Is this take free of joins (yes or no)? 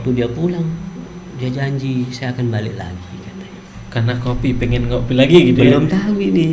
yes